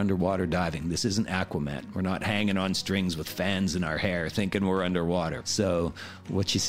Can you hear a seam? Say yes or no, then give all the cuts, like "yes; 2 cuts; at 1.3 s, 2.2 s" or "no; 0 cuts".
no; 0 cuts